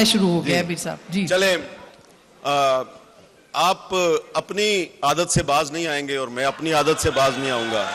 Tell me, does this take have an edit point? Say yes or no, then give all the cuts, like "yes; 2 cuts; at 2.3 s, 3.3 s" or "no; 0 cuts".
no; 0 cuts